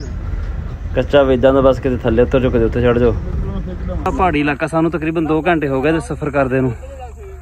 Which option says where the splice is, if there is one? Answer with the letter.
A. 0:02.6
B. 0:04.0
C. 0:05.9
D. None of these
B